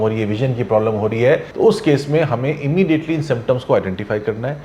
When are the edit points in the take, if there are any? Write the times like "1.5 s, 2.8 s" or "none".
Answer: 1.5 s